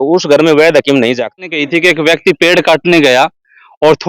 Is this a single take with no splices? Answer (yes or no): no